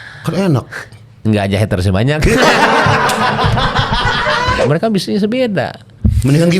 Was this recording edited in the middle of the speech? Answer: yes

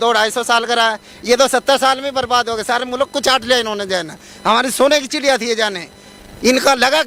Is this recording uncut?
yes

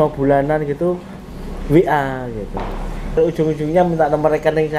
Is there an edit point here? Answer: yes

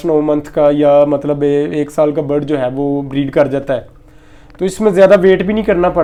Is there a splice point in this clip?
no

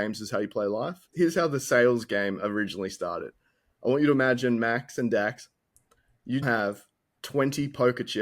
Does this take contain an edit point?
yes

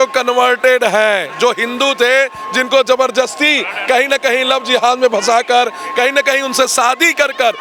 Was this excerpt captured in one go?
yes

